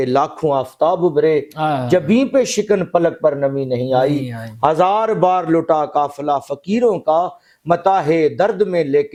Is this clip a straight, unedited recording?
yes; 0 cuts

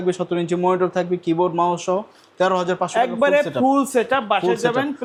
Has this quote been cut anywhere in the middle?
no; 0 cuts

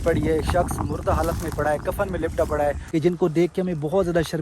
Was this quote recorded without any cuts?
no; 1 cut; at 2.9 s

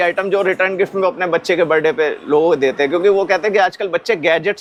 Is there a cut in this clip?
no; 0 cuts

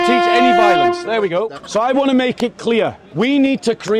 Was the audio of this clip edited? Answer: yes; 2 cuts; at 1.6 s, 3.0 s

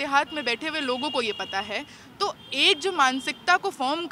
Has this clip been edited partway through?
no; 0 cuts

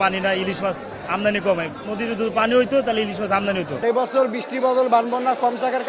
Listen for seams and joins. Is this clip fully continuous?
no; 2 cuts; at 0.9 s, 3.7 s

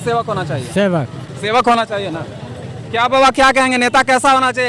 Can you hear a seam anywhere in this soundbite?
no; 0 cuts

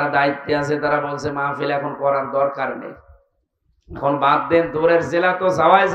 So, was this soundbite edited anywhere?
no; 0 cuts

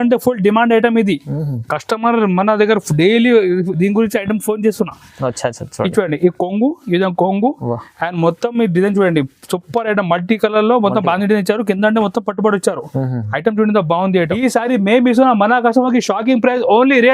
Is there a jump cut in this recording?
yes; 1 cut; at 14.3 s

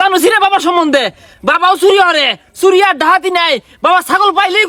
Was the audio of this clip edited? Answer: no; 0 cuts

